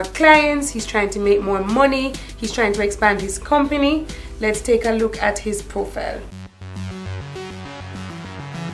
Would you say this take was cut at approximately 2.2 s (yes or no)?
no